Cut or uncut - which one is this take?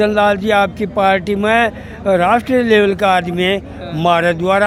uncut